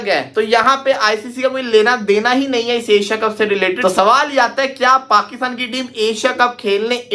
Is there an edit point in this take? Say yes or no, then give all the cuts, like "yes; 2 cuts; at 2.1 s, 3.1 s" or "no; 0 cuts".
yes; 1 cut; at 3.8 s